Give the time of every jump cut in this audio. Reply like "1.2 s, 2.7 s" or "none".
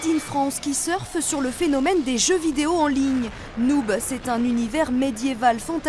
4.0 s

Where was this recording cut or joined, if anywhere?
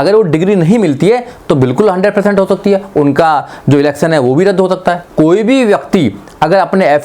5.0 s

